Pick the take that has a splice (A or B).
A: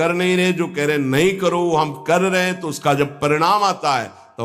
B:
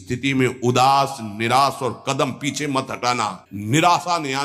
B